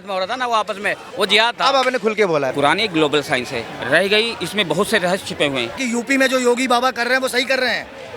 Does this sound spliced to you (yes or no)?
yes